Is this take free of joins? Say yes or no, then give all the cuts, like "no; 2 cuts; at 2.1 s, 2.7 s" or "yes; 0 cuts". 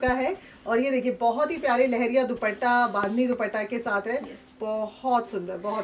yes; 0 cuts